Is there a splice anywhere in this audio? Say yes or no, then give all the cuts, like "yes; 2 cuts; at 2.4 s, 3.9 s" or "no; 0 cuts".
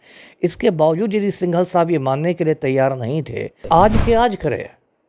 yes; 1 cut; at 3.6 s